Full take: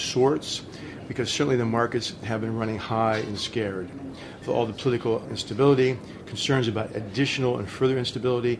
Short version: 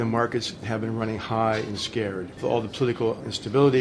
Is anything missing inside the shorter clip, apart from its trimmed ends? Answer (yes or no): yes